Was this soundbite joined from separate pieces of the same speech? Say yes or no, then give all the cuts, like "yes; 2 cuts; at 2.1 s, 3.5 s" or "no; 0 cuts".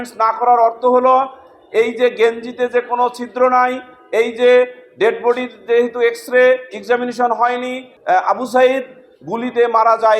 yes; 1 cut; at 7.8 s